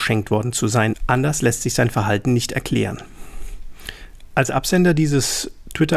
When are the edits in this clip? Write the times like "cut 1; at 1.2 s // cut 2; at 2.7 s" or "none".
none